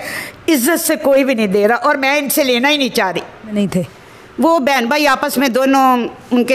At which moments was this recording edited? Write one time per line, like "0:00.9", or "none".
0:03.5